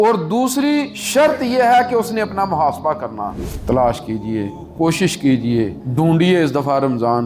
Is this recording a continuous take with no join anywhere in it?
no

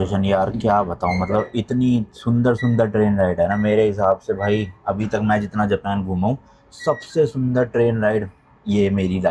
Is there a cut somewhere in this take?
no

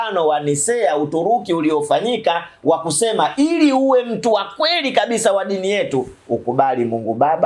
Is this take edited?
no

